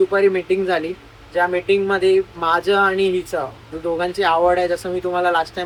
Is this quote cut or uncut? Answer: uncut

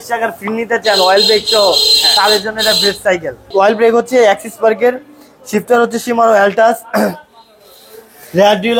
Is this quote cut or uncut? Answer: uncut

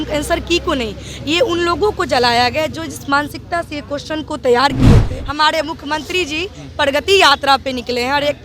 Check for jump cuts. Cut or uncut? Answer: cut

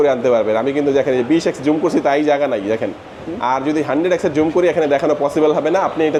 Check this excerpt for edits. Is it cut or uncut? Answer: uncut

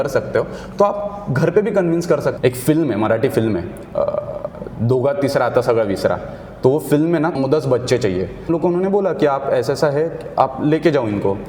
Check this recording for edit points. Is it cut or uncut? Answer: cut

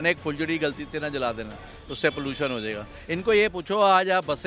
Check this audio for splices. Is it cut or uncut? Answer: uncut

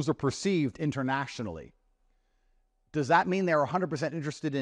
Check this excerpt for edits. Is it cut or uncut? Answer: uncut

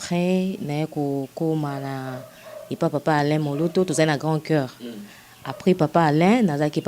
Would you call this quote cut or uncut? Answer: uncut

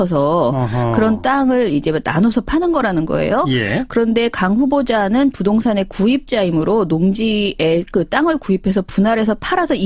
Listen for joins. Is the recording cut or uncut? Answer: uncut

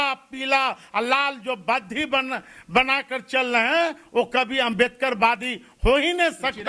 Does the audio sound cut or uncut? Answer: uncut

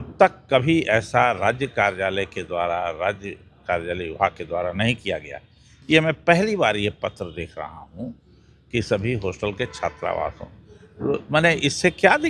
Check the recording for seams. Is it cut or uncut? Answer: uncut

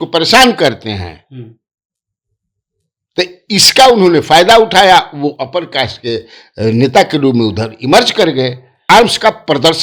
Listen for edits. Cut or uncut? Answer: cut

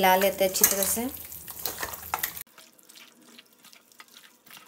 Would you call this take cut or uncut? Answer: uncut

